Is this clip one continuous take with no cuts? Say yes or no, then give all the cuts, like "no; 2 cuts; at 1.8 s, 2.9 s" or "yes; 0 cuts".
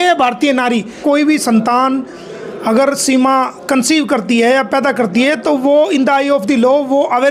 no; 1 cut; at 1.0 s